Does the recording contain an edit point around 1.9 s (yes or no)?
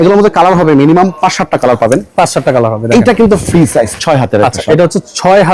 no